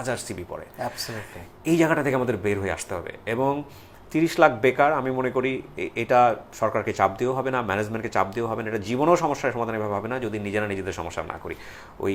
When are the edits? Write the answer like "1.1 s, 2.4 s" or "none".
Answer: none